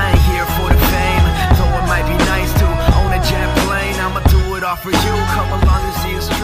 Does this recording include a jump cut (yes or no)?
no